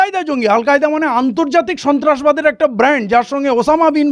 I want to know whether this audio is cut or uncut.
uncut